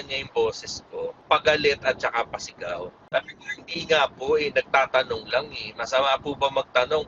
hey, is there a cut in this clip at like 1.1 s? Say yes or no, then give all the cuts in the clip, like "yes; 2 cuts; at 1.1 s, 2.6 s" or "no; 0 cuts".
yes; 2 cuts; at 1.1 s, 3.1 s